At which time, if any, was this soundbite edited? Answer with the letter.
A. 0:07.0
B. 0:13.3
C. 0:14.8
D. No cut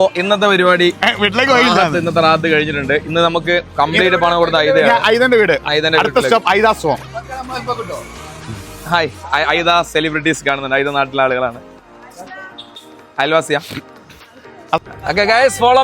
C